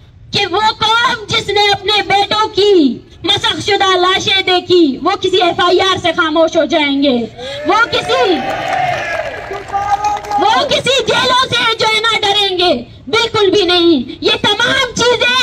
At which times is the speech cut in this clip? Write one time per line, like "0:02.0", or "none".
none

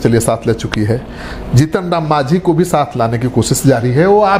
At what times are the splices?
none

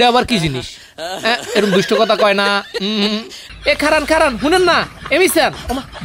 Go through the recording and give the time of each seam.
0:03.5

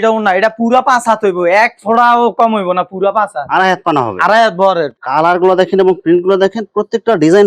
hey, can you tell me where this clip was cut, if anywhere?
0:04.9

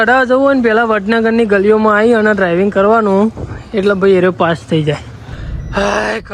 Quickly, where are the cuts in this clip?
0:05.4

